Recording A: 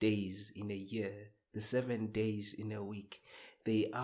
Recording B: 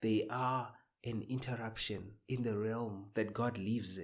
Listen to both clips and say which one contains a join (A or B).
B